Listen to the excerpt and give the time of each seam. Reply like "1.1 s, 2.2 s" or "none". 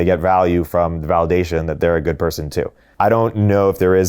2.8 s